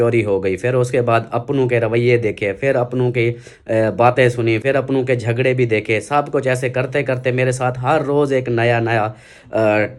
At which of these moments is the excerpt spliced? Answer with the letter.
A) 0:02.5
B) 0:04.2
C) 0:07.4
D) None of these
D